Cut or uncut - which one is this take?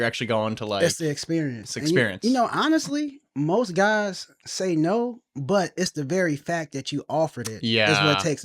uncut